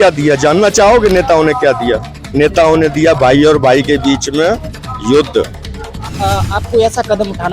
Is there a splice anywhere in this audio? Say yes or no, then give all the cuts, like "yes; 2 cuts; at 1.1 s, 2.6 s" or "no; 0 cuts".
yes; 1 cut; at 6.1 s